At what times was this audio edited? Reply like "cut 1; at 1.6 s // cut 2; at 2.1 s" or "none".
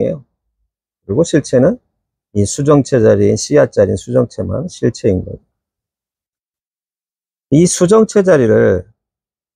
none